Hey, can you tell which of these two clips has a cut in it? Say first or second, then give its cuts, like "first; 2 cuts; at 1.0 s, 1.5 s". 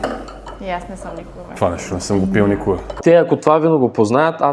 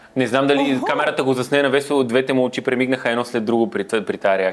first; 1 cut; at 3.0 s